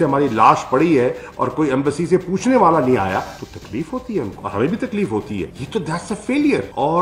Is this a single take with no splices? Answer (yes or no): no